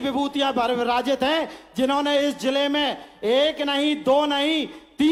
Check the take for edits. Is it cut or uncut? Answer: uncut